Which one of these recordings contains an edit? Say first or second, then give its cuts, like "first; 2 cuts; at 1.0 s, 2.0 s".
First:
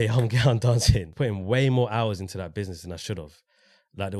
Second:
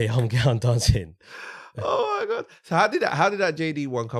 first; 1 cut; at 1.1 s